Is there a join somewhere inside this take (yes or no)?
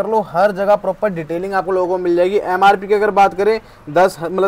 no